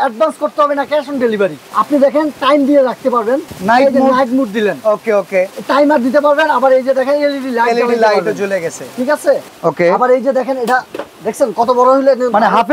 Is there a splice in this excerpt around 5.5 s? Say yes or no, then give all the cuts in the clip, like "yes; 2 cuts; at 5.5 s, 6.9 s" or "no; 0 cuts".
no; 3 cuts; at 1.7 s, 3.5 s, 9.5 s